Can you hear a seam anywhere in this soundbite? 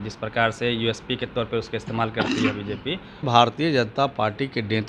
yes; 1 cut; at 3.3 s

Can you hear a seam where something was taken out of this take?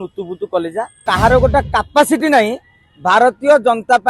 yes; 1 cut; at 1.0 s

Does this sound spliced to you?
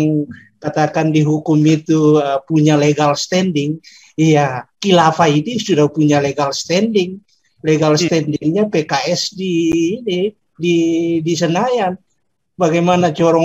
no; 0 cuts

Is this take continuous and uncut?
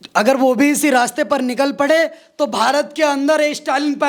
yes; 0 cuts

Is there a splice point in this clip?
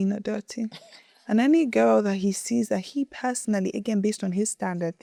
no; 0 cuts

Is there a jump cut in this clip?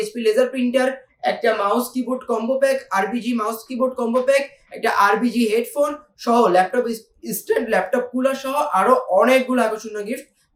no; 0 cuts

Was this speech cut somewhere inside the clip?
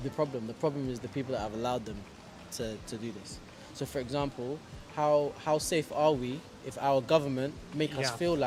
no; 0 cuts

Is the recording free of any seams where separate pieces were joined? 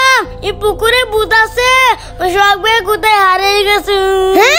yes; 0 cuts

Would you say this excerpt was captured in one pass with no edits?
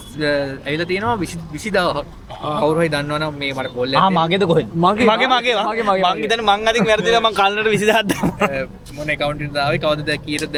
yes; 0 cuts

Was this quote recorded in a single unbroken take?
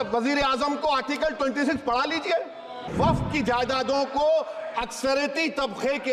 no; 1 cut; at 2.9 s

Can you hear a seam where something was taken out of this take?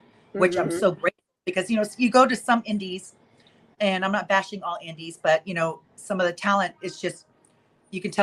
no; 0 cuts

